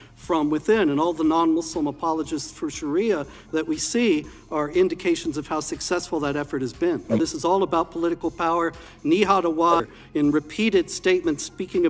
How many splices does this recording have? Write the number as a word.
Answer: two